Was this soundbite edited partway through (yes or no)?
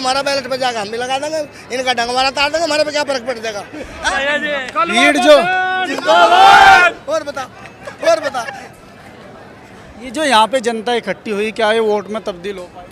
no